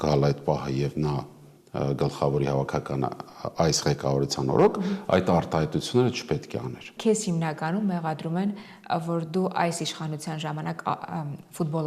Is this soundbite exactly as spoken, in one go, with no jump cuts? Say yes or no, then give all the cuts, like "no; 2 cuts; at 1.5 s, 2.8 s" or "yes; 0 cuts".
no; 1 cut; at 6.9 s